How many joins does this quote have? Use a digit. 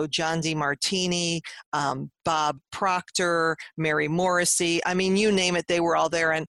0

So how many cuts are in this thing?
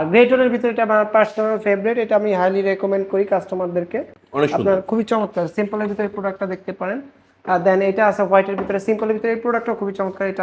0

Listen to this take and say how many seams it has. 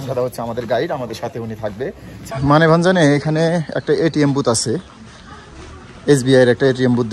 1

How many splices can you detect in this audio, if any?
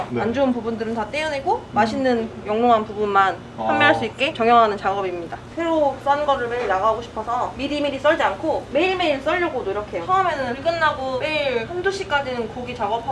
1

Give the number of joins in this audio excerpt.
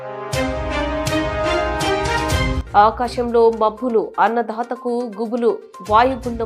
1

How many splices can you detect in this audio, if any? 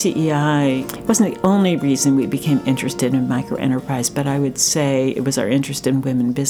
1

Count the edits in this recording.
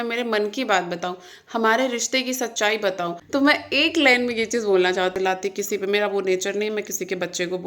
2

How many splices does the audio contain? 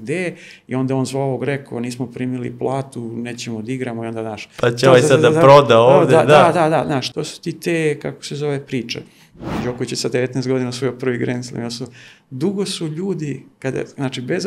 2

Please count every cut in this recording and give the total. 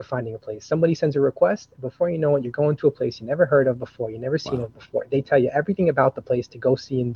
0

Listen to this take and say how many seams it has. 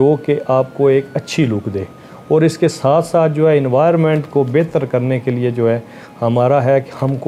0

